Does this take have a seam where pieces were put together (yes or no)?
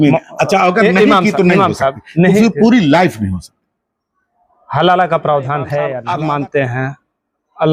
yes